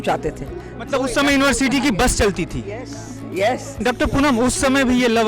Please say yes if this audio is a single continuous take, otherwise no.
no